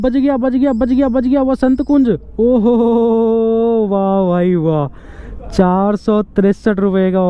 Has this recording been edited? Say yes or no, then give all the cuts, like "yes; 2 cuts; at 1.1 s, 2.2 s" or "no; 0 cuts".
no; 0 cuts